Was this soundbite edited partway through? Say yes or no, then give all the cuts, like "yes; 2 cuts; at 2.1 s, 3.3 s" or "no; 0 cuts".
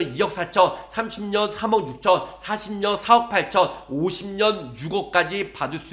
no; 0 cuts